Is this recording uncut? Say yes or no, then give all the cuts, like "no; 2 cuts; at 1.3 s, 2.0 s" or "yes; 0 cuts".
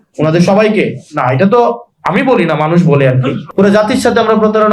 no; 1 cut; at 3.4 s